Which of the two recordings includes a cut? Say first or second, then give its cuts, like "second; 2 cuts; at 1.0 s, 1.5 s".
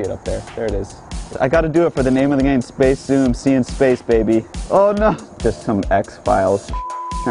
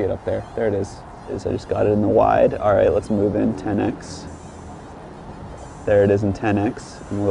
first; 3 cuts; at 1.3 s, 4.6 s, 5.3 s